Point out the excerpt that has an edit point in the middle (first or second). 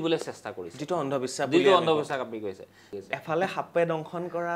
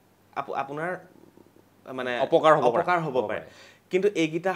first